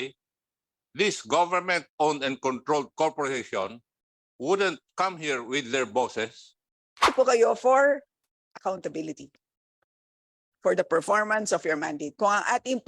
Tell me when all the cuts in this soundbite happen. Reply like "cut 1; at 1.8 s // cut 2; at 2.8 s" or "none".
cut 1; at 7.0 s